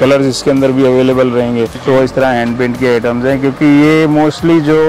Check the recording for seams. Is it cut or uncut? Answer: cut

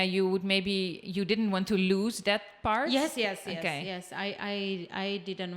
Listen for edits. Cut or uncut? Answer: uncut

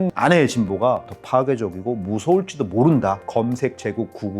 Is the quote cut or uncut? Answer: cut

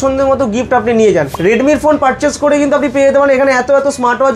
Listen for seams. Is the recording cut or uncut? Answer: cut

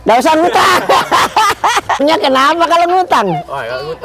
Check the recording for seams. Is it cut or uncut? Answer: cut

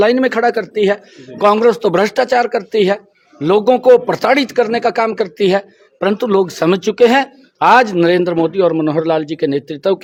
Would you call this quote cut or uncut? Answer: uncut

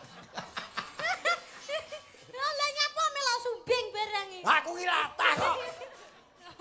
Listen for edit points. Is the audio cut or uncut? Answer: uncut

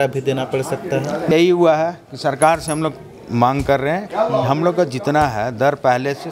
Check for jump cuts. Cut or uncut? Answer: cut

